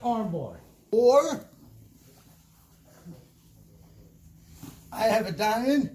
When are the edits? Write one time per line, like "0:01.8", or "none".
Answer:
0:00.9